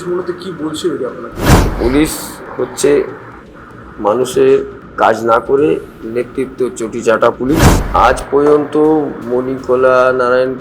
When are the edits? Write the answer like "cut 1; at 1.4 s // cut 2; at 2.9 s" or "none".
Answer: cut 1; at 1.7 s // cut 2; at 7.8 s